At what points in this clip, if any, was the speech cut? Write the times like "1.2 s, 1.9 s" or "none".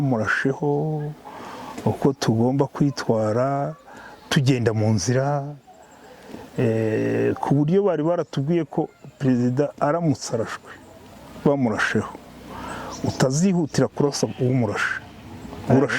none